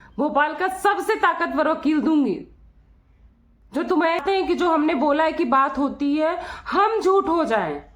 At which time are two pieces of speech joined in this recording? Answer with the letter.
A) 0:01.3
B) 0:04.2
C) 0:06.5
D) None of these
B